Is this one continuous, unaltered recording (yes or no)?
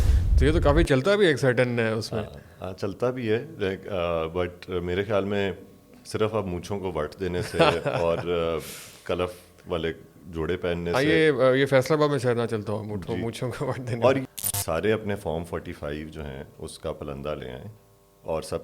no